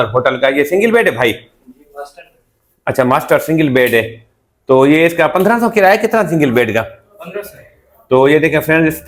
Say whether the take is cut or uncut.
uncut